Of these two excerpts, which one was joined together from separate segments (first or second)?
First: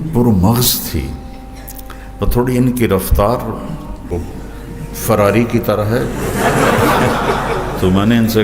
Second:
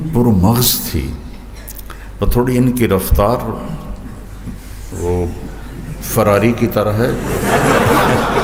first